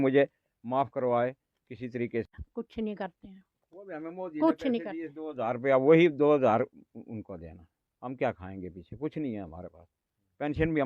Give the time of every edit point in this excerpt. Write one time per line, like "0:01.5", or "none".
0:02.3